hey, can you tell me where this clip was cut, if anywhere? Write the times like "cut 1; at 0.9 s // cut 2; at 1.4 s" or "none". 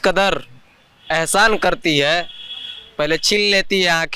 none